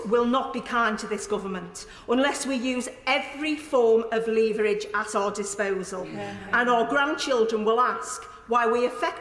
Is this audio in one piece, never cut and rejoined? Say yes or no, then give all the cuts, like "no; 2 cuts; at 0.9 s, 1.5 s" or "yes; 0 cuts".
yes; 0 cuts